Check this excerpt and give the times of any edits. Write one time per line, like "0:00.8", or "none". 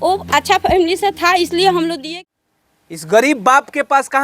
0:02.1